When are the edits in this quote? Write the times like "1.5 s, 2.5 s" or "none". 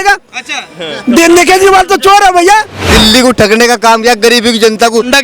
2.8 s